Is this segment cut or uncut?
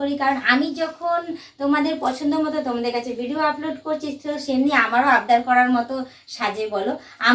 uncut